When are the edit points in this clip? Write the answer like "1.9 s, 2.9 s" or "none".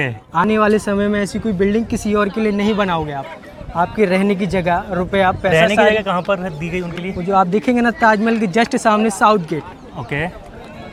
none